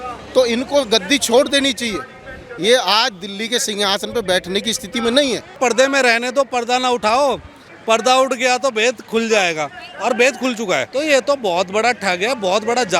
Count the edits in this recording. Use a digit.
2